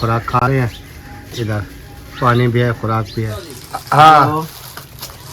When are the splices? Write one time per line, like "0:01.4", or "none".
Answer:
0:03.4